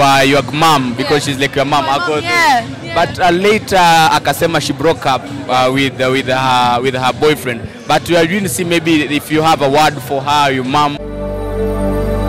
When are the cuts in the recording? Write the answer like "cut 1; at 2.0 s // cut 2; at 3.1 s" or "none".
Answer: cut 1; at 11.1 s